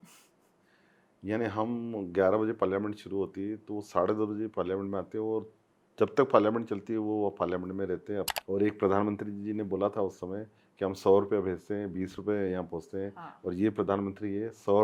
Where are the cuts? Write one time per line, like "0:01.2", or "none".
0:08.4